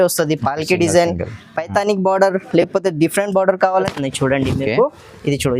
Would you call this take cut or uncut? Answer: cut